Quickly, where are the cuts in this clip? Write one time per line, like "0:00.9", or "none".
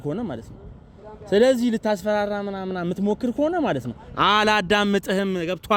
none